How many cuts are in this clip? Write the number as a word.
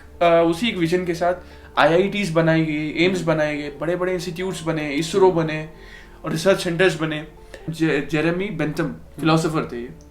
one